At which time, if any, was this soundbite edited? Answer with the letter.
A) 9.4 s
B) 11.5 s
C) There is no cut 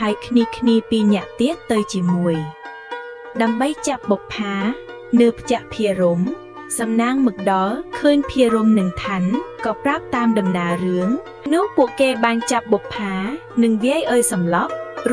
B